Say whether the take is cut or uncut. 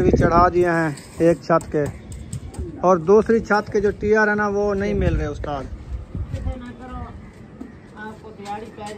cut